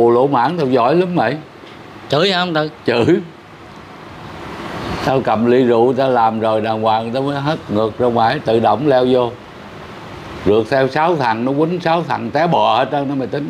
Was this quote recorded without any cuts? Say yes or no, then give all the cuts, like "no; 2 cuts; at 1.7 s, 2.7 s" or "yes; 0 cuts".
yes; 0 cuts